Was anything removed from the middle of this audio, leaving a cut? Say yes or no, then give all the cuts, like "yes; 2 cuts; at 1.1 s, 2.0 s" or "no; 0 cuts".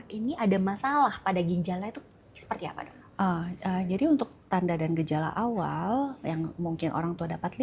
no; 0 cuts